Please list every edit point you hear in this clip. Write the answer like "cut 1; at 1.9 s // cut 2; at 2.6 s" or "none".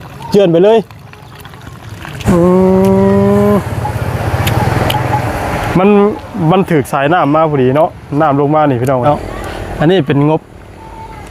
cut 1; at 2.2 s // cut 2; at 9.0 s